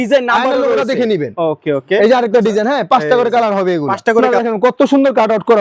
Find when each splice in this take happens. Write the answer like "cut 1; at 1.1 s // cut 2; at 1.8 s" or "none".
cut 1; at 4.3 s